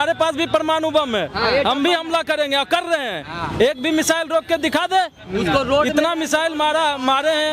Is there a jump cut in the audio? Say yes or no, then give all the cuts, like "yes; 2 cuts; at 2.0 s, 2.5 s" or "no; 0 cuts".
no; 0 cuts